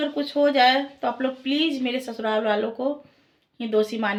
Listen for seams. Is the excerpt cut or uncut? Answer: uncut